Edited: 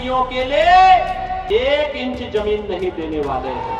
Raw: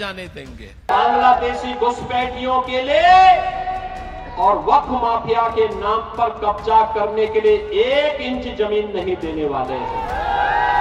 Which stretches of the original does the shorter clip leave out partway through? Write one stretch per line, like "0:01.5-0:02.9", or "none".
0:03.8-0:07.7